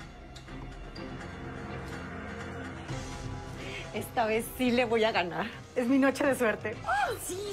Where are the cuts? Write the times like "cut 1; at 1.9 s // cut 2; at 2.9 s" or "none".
cut 1; at 2.0 s